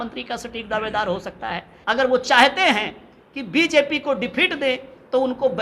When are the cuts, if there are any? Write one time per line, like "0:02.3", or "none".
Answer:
0:01.7